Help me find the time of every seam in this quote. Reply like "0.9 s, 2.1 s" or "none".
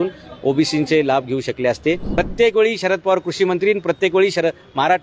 2.1 s